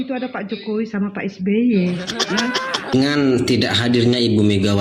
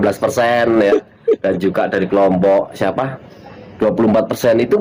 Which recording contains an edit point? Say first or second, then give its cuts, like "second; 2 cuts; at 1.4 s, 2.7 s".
first; 1 cut; at 2.9 s